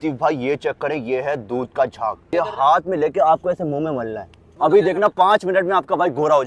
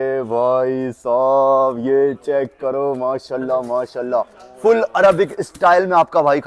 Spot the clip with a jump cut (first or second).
first